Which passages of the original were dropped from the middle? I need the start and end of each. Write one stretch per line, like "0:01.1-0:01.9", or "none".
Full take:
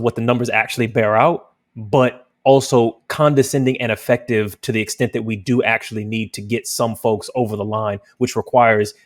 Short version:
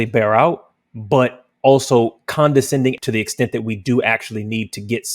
0:03.8-0:04.6